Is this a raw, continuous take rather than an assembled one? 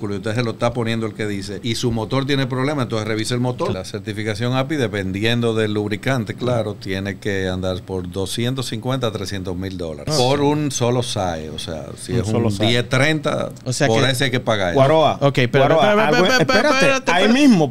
no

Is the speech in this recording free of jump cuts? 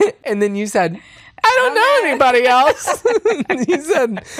yes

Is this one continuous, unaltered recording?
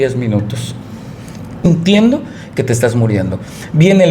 no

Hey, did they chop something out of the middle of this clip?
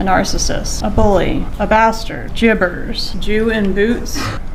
no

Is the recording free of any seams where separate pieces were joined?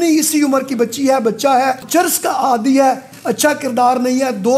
no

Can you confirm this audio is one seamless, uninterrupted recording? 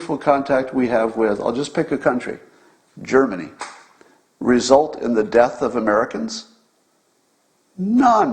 yes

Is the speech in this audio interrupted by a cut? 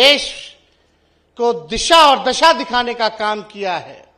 no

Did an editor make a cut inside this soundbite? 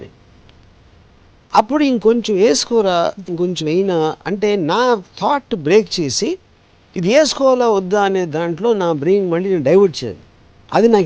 no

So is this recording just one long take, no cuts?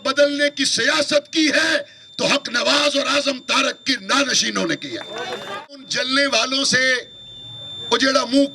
no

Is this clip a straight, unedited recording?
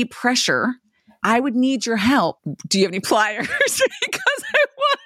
no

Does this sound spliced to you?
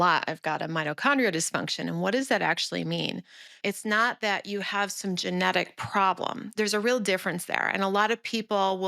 yes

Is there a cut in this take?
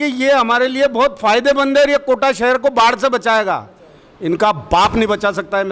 no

